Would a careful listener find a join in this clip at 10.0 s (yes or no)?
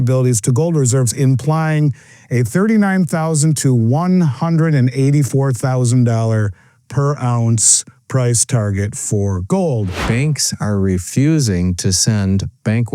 yes